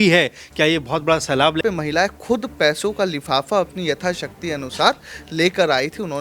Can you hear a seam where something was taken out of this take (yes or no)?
yes